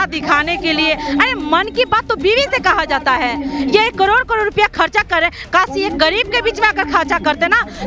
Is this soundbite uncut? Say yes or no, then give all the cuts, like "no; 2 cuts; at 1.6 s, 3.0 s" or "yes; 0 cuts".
yes; 0 cuts